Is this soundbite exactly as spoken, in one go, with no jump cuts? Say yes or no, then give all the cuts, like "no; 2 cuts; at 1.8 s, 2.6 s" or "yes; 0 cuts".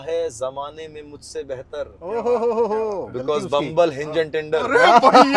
yes; 0 cuts